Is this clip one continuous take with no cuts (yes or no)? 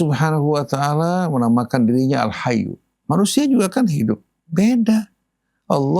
yes